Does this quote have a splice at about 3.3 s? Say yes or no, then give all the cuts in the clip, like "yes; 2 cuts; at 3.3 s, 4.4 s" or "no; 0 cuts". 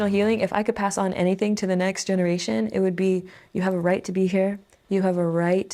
no; 0 cuts